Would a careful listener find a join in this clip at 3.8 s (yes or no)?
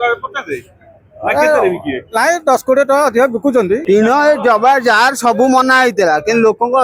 yes